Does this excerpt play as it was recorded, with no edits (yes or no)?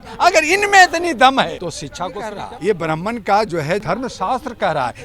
no